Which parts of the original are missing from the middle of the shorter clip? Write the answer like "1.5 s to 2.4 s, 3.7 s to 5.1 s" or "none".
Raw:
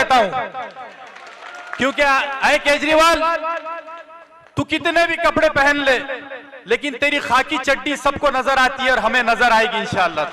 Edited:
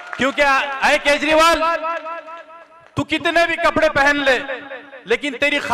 none